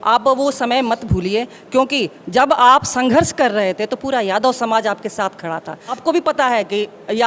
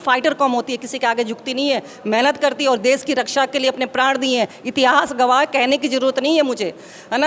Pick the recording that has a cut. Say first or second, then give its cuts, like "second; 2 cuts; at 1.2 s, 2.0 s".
first; 1 cut; at 5.9 s